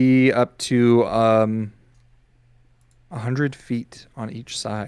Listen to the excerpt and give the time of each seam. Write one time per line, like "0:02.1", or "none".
none